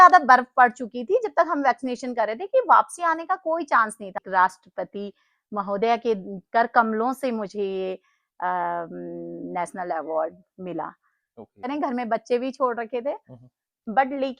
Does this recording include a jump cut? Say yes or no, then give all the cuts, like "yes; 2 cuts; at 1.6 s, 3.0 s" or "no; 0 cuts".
yes; 2 cuts; at 4.2 s, 11.7 s